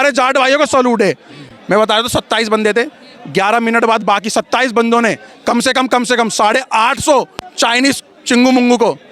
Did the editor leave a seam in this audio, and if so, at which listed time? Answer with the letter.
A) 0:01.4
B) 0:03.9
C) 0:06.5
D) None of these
D